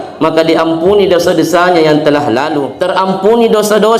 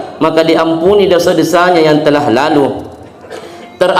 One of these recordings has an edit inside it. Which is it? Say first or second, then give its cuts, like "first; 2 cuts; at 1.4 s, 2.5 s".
first; 1 cut; at 2.7 s